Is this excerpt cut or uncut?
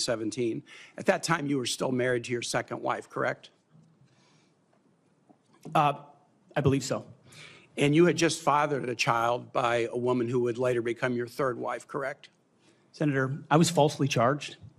cut